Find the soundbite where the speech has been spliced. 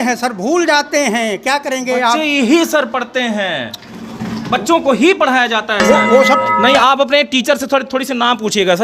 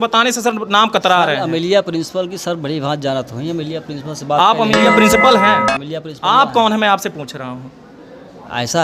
first; 1 cut; at 6.4 s

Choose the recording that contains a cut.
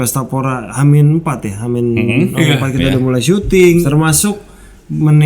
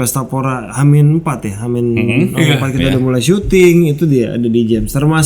first; 1 cut; at 3.9 s

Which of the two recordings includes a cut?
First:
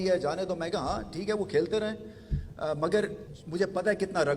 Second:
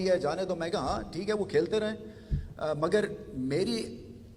first; 1 cut; at 3.3 s

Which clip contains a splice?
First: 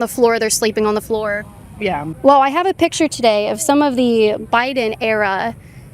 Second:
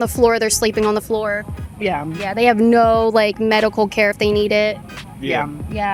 first; 1 cut; at 2.1 s

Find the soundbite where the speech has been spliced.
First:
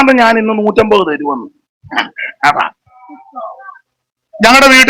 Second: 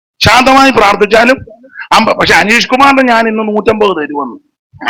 first; 1 cut; at 3.2 s

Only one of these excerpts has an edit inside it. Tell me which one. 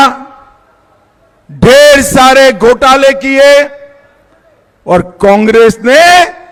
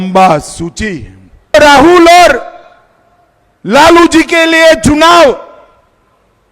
second; 1 cut; at 1.5 s

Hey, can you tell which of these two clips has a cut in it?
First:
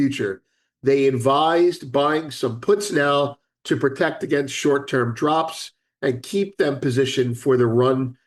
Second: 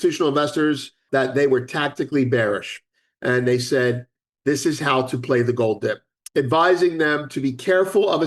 second; 2 cuts; at 1.0 s, 6.1 s

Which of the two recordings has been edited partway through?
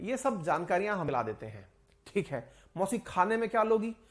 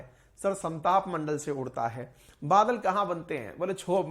first; 1 cut; at 1.1 s

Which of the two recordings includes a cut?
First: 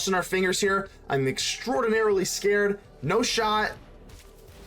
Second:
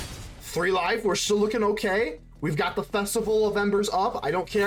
first; 1 cut; at 2.9 s

